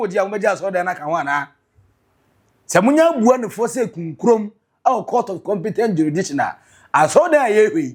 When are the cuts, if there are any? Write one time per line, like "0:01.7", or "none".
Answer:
none